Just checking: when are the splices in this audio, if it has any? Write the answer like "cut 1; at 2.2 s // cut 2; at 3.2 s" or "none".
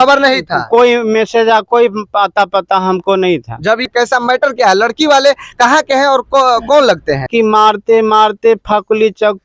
cut 1; at 3.9 s // cut 2; at 7.3 s